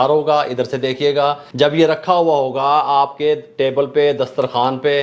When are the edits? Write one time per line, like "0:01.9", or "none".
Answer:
0:01.4